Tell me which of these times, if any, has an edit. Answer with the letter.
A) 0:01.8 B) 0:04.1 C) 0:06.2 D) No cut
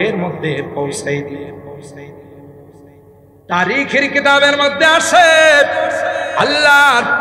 D